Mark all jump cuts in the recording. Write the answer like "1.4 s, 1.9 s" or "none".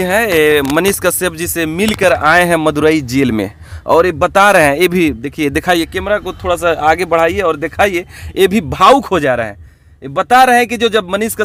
none